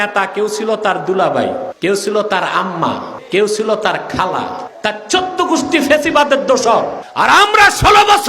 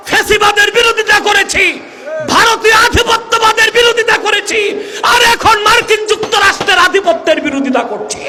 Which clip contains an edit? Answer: first; 4 cuts; at 1.7 s, 3.1 s, 4.7 s, 7.0 s

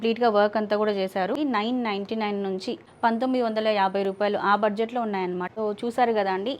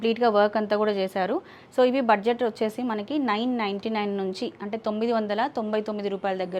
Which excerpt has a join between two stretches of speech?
first; 3 cuts; at 1.3 s, 2.8 s, 5.4 s

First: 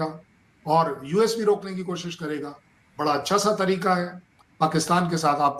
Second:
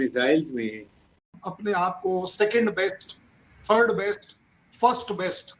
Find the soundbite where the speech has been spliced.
second; 1 cut; at 1.3 s

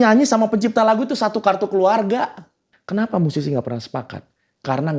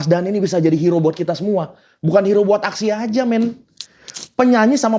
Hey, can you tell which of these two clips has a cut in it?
first; 1 cut; at 2.7 s

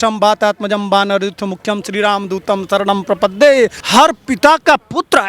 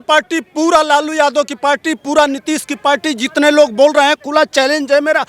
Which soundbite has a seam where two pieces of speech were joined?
first; 1 cut; at 3.8 s

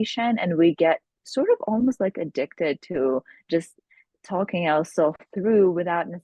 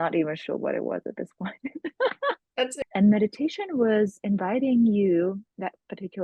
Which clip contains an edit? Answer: second; 1 cut; at 2.8 s

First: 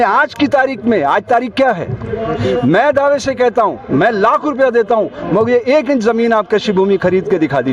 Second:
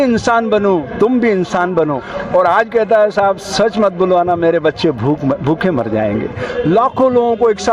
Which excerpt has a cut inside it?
second; 2 cuts; at 2.1 s, 6.5 s

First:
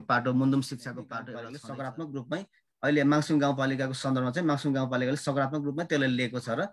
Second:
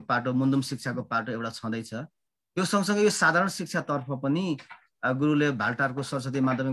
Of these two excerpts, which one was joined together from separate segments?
first; 1 cut; at 1.2 s

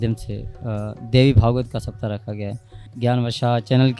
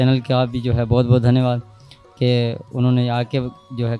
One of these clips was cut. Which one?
first; 1 cut; at 2.8 s

